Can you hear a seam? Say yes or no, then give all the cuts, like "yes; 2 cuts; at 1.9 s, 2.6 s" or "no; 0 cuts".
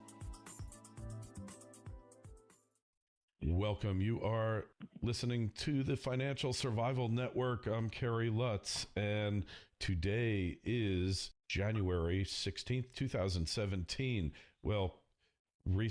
yes; 1 cut; at 9.5 s